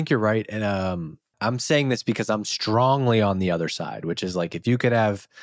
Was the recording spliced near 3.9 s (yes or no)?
no